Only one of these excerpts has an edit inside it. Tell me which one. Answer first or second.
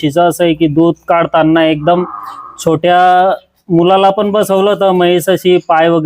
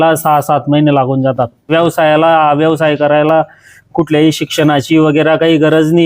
second